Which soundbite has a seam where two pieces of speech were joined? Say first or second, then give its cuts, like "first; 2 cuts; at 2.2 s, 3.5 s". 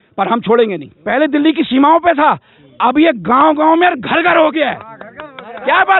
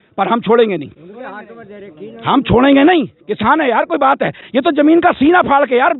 first; 1 cut; at 0.9 s